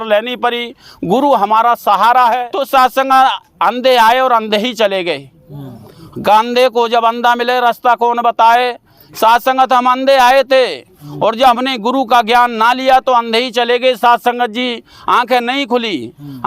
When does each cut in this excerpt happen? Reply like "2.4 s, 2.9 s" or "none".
2.5 s